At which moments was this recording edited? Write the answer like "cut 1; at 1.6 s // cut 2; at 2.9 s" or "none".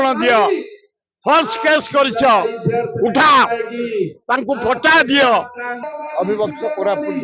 cut 1; at 5.8 s